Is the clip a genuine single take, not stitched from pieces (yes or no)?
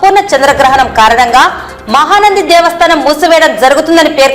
yes